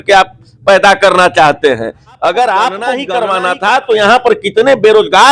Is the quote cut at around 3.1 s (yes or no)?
yes